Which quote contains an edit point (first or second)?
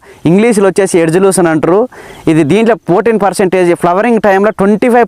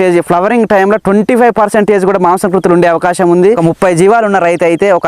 second